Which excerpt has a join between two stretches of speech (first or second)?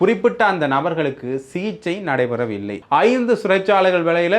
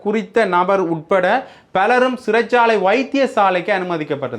first